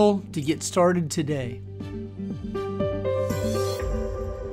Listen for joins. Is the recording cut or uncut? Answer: cut